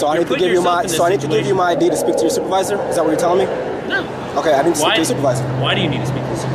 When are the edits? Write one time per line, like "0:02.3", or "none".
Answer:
none